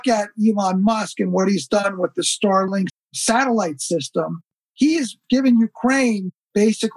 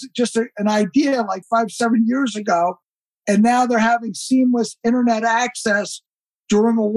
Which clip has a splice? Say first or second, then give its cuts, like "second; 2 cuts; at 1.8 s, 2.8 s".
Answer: first; 1 cut; at 1.8 s